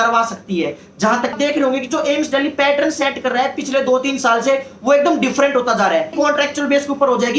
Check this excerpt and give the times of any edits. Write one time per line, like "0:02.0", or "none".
0:01.3
0:06.1